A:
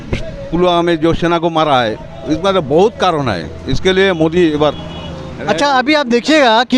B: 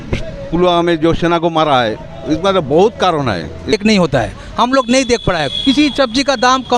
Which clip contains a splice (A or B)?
B